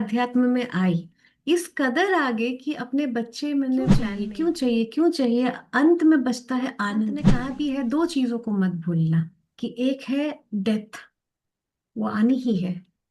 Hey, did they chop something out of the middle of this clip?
yes; 3 cuts; at 4.1 s, 7.3 s, 9.4 s

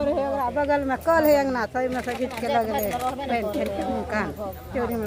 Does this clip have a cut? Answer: no; 0 cuts

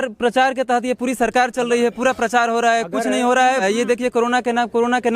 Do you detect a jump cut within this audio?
yes; 1 cut; at 3.6 s

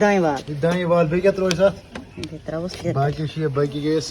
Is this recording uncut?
yes; 0 cuts

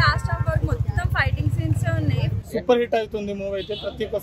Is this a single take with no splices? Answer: no; 1 cut; at 2.4 s

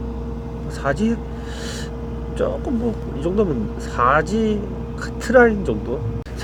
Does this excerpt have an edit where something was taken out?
no; 0 cuts

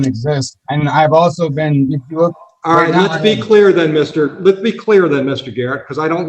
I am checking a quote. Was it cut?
no; 0 cuts

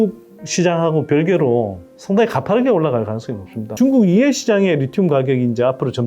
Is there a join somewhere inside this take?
yes; 1 cut; at 3.7 s

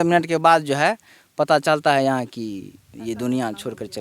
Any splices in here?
no; 0 cuts

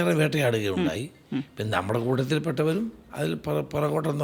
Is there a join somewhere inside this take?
no; 0 cuts

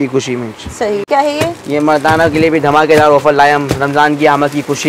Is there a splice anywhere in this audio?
no; 0 cuts

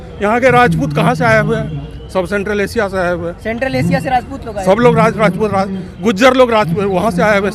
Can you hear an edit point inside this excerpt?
no; 0 cuts

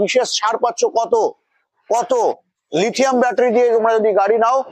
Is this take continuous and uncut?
yes; 0 cuts

